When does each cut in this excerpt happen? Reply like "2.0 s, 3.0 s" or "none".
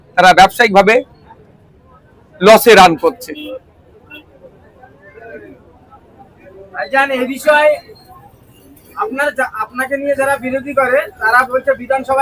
none